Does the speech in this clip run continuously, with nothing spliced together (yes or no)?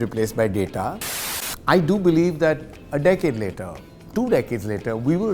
no